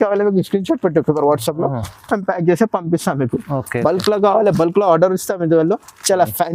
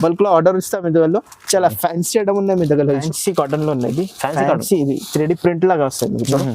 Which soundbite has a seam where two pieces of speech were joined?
second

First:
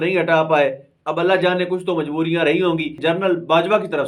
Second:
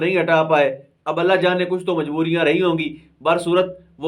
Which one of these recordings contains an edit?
first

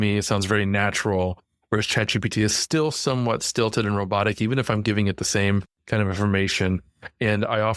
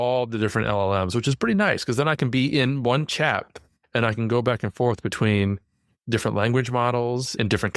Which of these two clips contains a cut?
first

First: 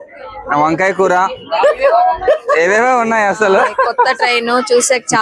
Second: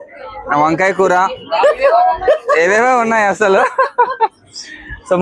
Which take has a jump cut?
first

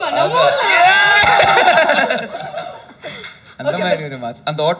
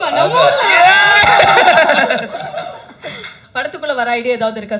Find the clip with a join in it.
second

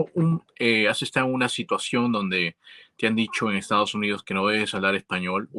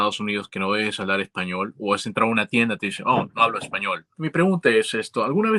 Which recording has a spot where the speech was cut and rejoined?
second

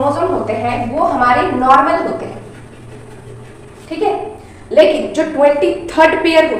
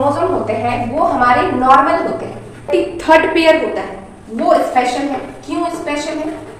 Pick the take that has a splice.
second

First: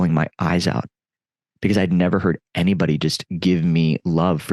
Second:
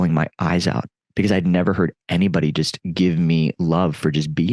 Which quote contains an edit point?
second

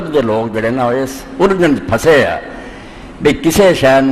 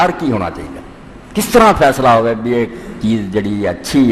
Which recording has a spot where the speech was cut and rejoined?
first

